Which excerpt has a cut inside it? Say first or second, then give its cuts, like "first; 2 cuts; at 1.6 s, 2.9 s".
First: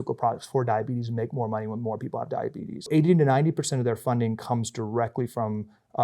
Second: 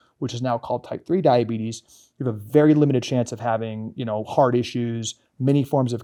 first; 1 cut; at 2.9 s